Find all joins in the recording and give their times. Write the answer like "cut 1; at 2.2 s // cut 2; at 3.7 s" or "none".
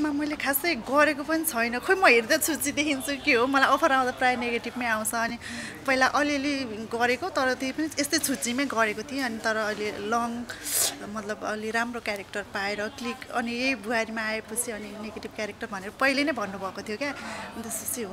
none